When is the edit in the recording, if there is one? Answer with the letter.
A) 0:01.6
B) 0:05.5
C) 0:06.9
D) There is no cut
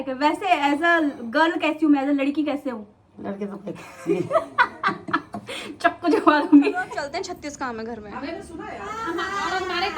C